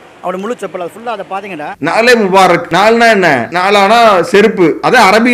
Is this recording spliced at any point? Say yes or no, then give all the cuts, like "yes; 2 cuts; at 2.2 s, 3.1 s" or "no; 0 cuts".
yes; 3 cuts; at 1.7 s, 2.7 s, 3.5 s